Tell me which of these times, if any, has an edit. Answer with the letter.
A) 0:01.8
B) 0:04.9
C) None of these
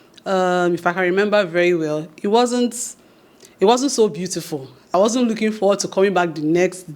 B